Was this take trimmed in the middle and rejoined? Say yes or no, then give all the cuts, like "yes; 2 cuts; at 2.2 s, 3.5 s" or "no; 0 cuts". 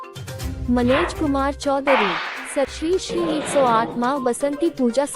yes; 1 cut; at 2.6 s